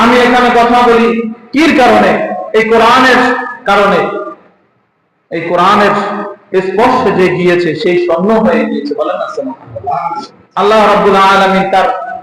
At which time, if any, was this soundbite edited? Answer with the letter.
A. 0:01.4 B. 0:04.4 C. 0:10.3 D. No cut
C